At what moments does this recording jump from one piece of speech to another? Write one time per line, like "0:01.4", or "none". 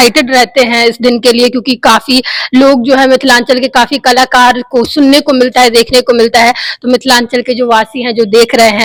none